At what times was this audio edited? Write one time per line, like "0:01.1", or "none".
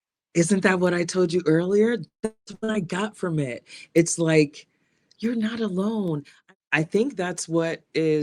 0:06.3